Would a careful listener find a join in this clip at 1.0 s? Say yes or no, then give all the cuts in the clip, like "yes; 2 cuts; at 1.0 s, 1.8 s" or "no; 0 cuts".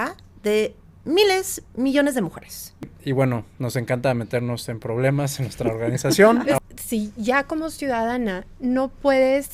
no; 2 cuts; at 2.9 s, 6.6 s